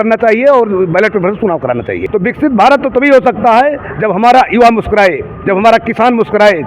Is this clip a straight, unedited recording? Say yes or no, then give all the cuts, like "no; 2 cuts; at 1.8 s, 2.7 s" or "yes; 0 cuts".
no; 1 cut; at 2.1 s